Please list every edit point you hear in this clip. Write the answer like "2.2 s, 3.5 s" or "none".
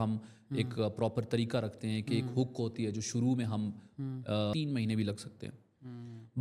4.5 s